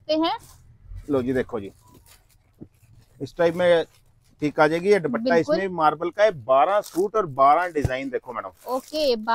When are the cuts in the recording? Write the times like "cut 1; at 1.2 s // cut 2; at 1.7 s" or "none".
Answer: none